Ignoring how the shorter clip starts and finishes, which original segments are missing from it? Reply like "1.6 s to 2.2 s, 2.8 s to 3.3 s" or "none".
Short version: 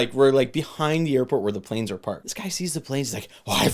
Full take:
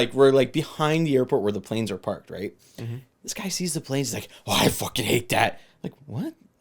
2.3 s to 3.3 s